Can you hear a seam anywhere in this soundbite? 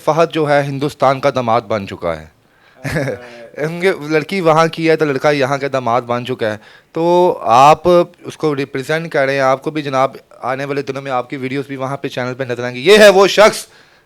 no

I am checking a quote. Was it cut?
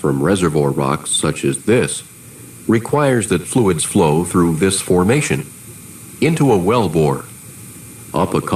yes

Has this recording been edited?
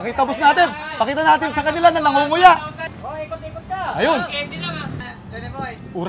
yes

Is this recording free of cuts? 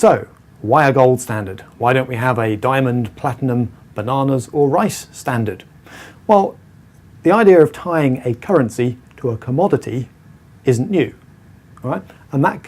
no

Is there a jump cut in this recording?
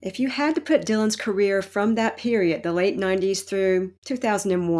no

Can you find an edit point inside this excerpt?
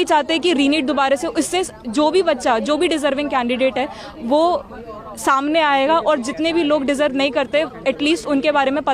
no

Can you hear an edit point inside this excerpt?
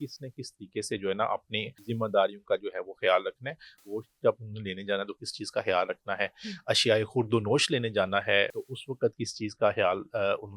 yes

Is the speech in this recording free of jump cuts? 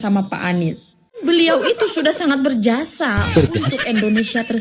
no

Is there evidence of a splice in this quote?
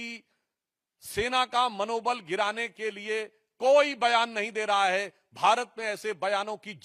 no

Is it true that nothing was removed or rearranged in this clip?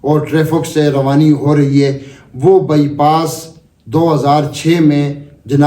yes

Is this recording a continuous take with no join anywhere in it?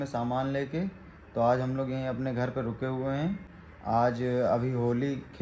yes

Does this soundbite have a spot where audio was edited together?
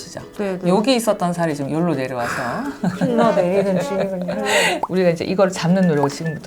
yes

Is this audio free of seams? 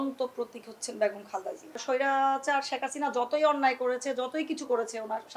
no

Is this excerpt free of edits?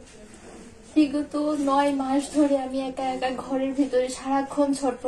yes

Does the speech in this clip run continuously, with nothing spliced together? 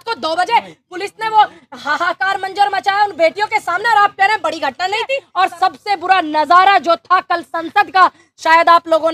no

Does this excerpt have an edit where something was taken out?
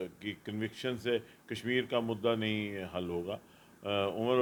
no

